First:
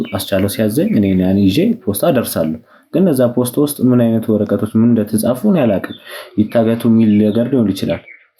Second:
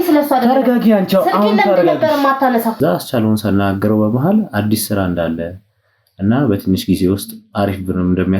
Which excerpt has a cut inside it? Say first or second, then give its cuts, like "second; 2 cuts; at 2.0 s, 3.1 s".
second; 1 cut; at 2.8 s